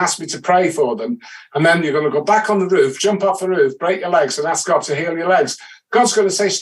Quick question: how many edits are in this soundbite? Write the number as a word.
zero